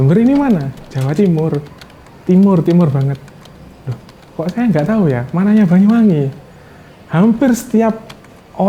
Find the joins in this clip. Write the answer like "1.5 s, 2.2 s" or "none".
none